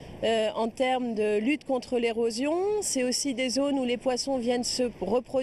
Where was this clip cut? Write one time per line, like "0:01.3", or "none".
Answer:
0:01.6